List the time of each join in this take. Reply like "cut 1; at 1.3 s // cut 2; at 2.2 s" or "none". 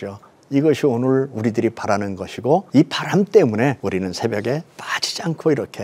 cut 1; at 2.7 s // cut 2; at 3.8 s